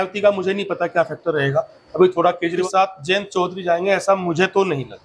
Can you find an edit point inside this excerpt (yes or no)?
yes